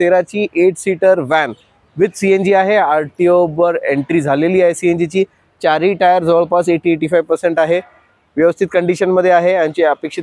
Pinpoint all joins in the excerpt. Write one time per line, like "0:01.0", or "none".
none